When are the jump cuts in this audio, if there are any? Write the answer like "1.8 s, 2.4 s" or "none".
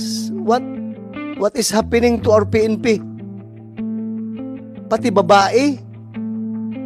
3.0 s, 4.7 s, 5.8 s

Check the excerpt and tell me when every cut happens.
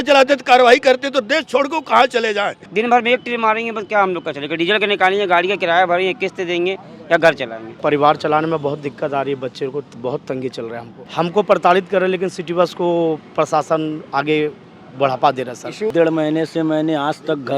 2.6 s, 7.8 s, 10.9 s, 15.9 s

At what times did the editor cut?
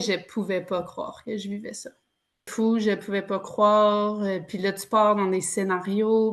2.5 s

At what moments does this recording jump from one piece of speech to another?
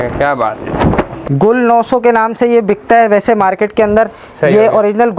1.2 s

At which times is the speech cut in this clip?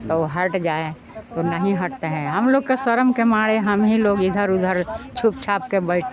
none

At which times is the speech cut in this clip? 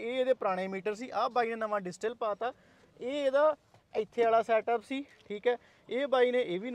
none

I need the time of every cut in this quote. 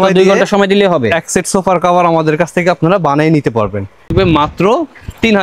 4.0 s

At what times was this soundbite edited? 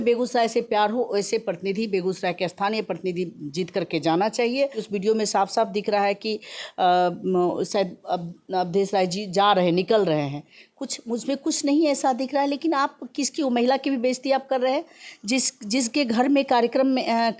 4.8 s

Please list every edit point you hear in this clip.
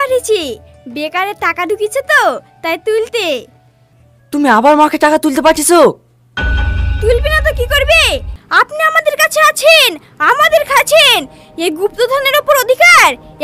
8.4 s

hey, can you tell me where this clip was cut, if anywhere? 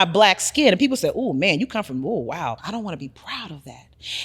2.6 s

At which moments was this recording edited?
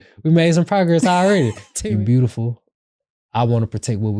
1.7 s

